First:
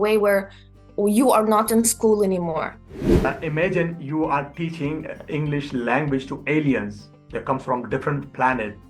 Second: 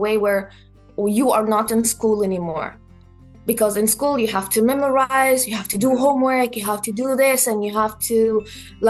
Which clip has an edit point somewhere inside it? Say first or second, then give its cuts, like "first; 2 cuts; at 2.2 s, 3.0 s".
first; 1 cut; at 3.3 s